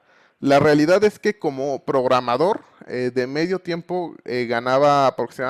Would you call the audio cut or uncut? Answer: uncut